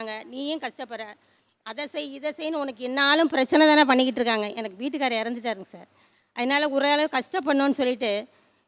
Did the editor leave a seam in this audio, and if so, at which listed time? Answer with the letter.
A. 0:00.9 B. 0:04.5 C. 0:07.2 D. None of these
D